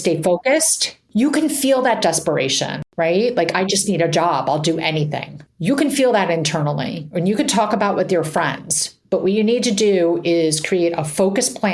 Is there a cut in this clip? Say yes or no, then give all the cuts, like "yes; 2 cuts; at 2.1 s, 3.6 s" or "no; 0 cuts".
yes; 2 cuts; at 1.0 s, 2.8 s